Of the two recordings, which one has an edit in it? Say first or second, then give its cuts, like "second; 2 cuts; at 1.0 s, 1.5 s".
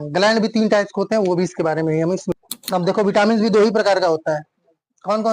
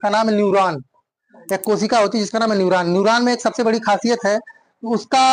first; 1 cut; at 2.4 s